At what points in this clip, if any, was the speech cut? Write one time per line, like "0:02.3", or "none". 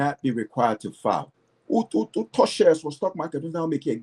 0:01.3